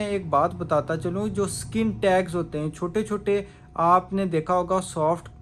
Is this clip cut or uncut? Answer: uncut